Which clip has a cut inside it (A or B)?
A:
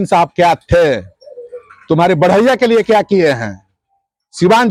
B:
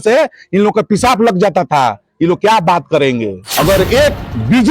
B